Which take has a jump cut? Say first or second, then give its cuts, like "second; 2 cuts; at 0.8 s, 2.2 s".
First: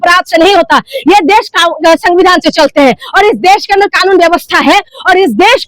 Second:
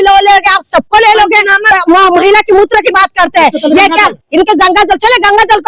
second; 1 cut; at 1.7 s